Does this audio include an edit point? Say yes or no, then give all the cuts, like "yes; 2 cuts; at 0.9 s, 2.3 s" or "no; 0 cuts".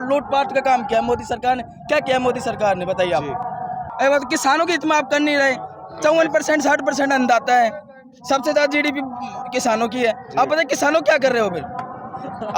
no; 0 cuts